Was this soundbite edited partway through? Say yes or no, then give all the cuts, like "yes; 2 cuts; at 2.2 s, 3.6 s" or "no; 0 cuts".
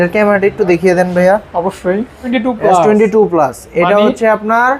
yes; 1 cut; at 2.2 s